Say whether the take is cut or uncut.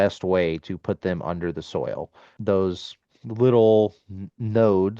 cut